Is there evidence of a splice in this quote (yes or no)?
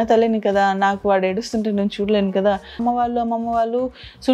yes